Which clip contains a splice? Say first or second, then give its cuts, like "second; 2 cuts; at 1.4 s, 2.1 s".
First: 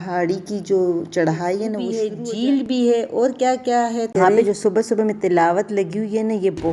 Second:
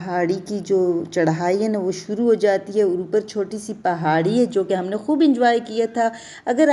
first; 2 cuts; at 2.2 s, 4.1 s